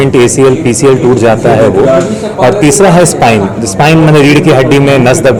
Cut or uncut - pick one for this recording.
uncut